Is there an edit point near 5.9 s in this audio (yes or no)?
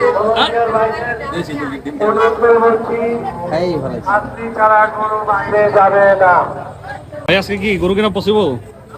no